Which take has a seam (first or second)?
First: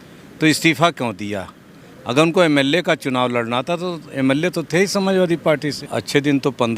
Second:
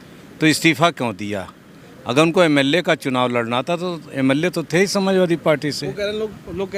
first